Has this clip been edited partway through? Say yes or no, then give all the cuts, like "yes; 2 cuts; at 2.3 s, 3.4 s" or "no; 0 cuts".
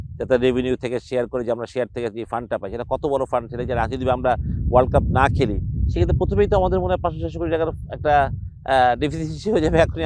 no; 0 cuts